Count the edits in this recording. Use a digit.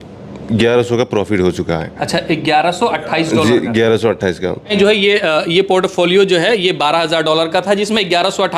1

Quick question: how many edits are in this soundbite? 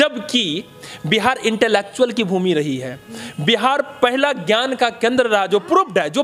0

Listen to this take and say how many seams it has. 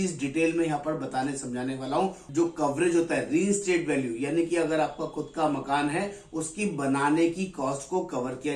1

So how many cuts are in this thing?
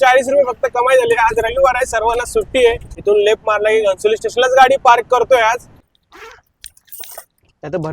2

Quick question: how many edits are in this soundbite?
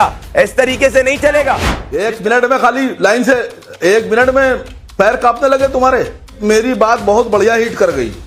3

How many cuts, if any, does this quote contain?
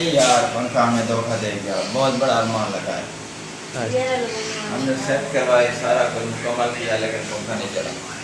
0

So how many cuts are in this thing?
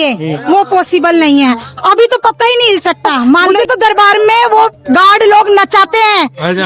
1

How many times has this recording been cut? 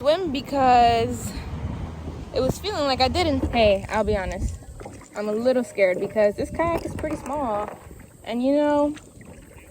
1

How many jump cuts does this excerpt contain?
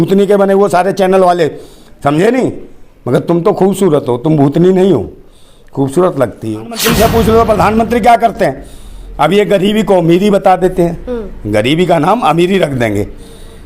1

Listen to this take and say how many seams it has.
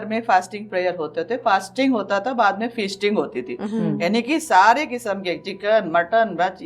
0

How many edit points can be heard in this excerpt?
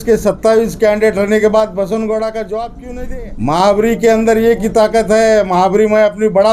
1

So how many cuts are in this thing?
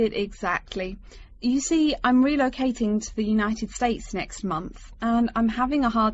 0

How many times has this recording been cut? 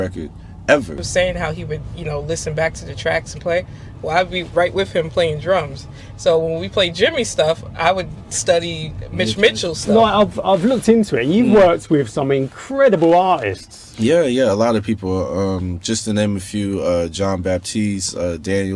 2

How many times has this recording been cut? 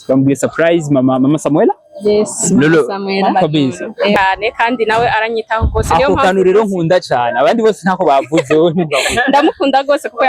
1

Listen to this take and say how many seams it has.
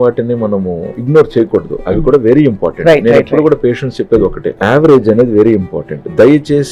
2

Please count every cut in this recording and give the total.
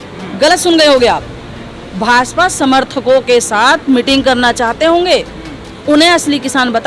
0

